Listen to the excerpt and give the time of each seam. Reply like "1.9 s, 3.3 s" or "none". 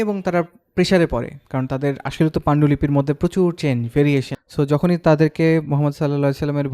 4.4 s